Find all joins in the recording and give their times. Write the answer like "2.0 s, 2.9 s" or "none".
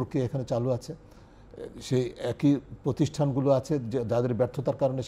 none